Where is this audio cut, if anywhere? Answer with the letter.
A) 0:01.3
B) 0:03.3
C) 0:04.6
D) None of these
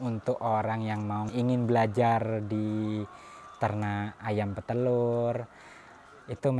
A